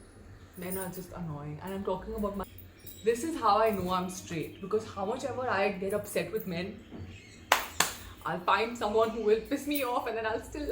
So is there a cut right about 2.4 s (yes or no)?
yes